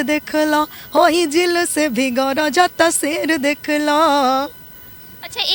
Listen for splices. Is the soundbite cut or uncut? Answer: uncut